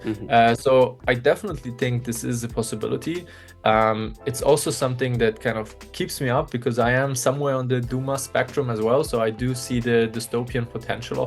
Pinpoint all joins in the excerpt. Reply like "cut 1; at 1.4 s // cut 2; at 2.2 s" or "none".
none